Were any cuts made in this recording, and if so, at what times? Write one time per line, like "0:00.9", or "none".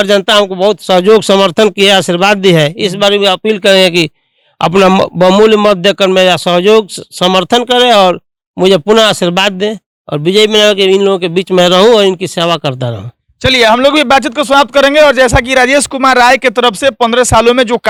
none

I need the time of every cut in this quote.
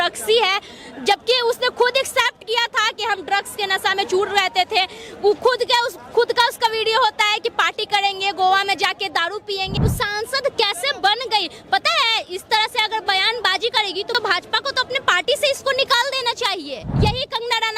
0:09.7
0:14.1
0:16.8

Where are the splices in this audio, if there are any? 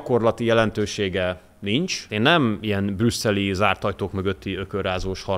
0:02.1

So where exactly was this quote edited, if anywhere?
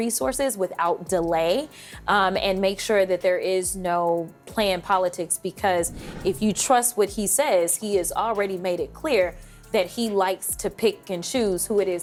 none

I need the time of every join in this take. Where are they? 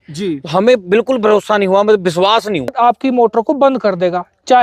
0:02.7

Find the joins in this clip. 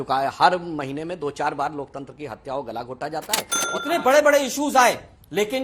0:03.4

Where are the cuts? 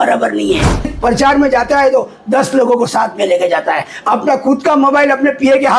0:00.9

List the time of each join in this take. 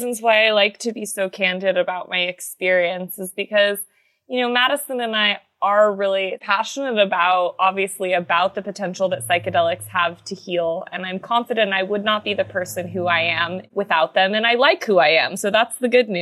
none

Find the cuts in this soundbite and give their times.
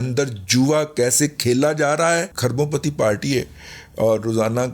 0:02.3

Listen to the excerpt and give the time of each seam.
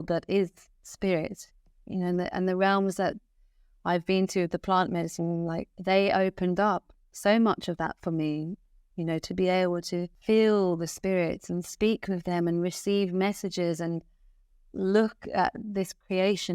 0:05.7
0:10.1

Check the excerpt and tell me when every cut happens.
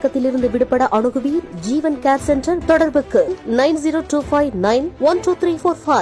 none

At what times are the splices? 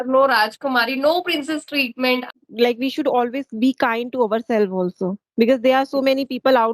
0:02.3

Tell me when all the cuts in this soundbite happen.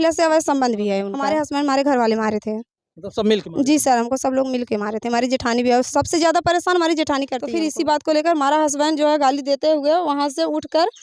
0:01.1
0:07.4

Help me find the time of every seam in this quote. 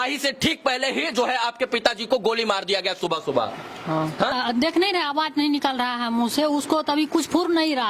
0:04.4

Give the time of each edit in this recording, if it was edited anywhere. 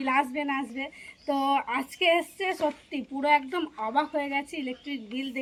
none

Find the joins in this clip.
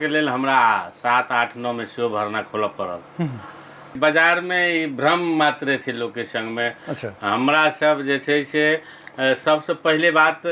0:04.0

